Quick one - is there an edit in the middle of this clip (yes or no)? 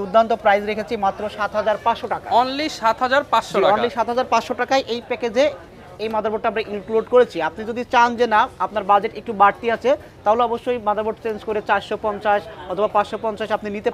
no